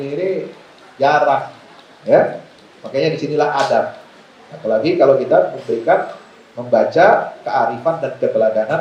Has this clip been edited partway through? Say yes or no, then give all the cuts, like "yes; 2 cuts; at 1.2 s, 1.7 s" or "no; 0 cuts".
no; 0 cuts